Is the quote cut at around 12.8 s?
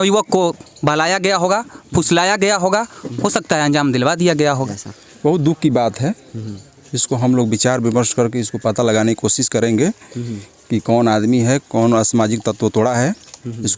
no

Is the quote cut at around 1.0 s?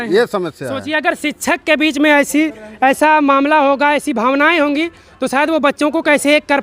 no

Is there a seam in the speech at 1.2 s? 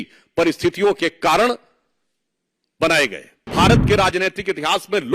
no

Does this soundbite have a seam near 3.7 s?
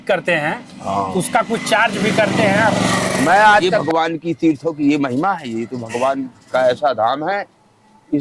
yes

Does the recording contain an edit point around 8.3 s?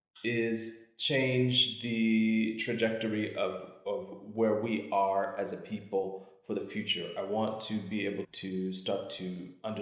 yes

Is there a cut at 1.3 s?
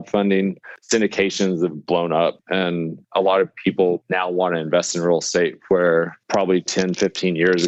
no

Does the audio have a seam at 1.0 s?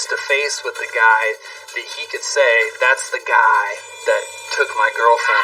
no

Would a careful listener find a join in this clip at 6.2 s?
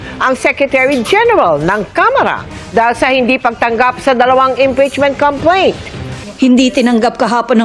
yes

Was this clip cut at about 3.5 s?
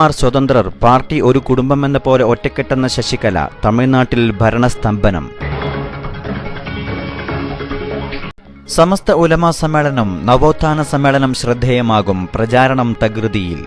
no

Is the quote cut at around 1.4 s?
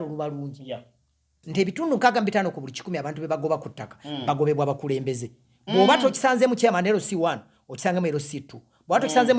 yes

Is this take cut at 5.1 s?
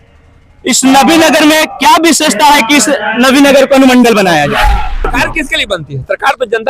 yes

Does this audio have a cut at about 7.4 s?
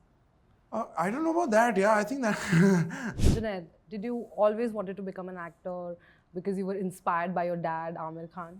no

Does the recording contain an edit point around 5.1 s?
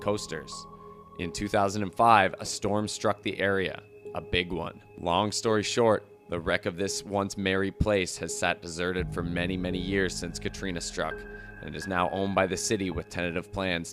no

